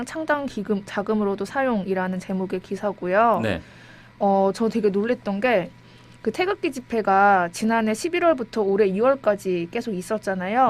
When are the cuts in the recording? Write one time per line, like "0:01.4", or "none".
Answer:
0:01.0